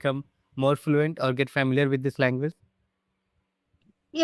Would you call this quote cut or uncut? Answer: uncut